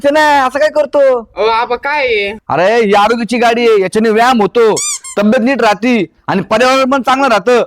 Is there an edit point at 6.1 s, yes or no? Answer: no